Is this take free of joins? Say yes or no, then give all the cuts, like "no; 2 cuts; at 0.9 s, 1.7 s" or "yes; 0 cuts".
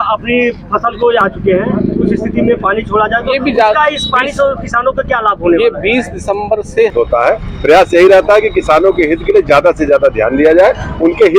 no; 2 cuts; at 1.2 s, 6.9 s